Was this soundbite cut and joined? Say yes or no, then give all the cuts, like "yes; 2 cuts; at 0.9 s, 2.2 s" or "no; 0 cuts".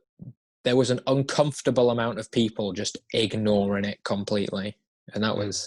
no; 0 cuts